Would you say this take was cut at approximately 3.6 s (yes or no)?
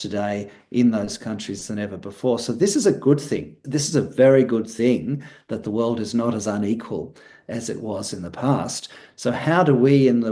yes